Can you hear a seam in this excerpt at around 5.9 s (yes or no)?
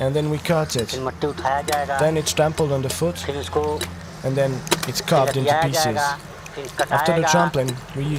no